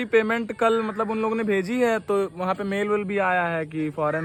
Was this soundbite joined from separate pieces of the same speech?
no; 0 cuts

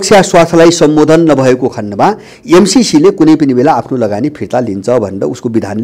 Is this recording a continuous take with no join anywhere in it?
yes; 0 cuts

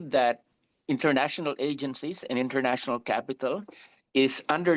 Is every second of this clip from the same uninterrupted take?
yes; 0 cuts

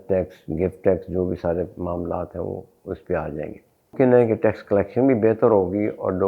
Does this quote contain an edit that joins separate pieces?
yes; 1 cut; at 3.9 s

